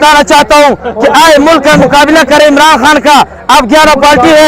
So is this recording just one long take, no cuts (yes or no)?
yes